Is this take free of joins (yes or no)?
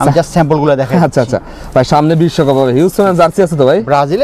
yes